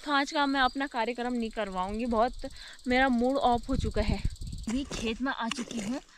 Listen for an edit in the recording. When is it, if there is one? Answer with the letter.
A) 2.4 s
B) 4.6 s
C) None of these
B